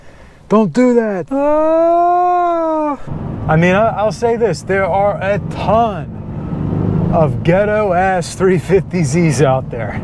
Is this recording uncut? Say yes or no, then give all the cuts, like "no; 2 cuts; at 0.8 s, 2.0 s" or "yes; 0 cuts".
no; 2 cuts; at 1.2 s, 3.1 s